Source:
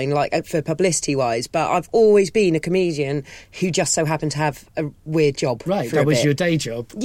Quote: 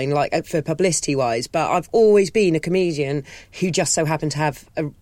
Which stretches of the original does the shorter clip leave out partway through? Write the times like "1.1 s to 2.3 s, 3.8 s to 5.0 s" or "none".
none